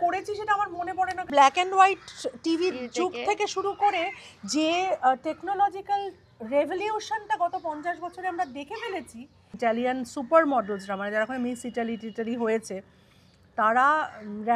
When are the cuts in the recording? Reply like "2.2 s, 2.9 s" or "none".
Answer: 1.3 s, 9.6 s